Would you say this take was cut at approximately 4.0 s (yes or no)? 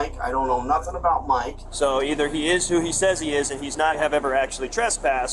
yes